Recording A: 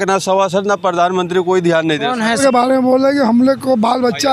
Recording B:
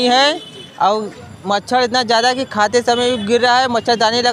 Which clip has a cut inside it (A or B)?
A